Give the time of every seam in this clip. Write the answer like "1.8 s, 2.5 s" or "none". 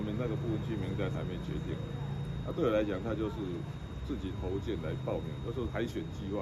none

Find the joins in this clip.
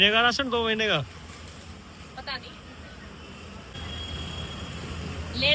3.8 s

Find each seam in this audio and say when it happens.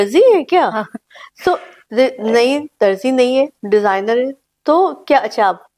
none

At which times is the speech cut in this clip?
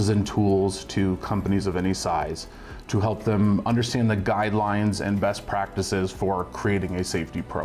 none

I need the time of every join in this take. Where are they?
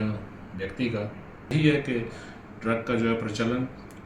1.5 s

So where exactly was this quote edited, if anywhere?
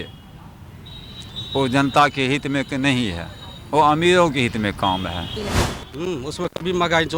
5.4 s

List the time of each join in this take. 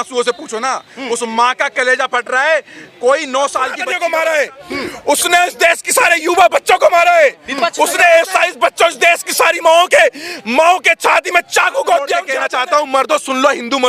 3.9 s, 12.4 s

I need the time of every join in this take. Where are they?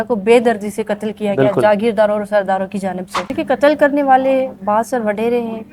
3.1 s

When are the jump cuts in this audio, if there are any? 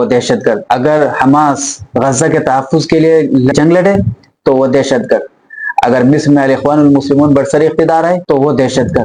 none

